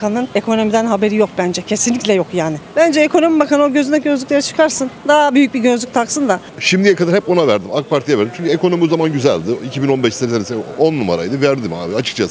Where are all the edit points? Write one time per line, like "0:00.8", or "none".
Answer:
0:02.6
0:06.5